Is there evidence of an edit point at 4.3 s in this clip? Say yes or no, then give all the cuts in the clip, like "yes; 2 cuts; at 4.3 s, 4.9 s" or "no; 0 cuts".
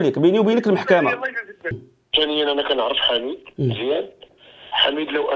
no; 1 cut; at 1.9 s